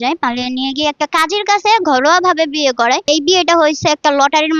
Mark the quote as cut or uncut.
cut